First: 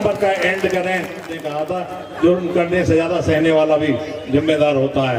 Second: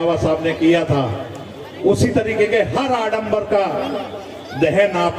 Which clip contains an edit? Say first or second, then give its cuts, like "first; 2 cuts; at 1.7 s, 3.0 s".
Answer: first; 1 cut; at 1.4 s